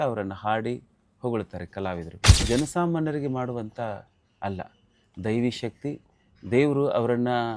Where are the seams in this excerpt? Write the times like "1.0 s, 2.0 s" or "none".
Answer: 2.3 s